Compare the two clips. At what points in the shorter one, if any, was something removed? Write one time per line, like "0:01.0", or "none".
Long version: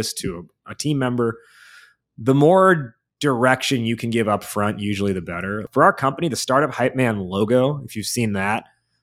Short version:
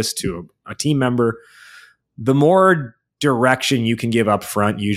none